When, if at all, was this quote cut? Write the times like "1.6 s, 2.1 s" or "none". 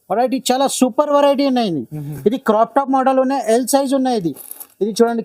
none